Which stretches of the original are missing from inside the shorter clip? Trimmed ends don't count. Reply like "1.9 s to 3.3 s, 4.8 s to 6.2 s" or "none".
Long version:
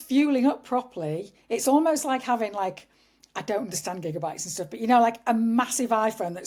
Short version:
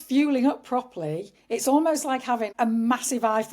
2.5 s to 5.2 s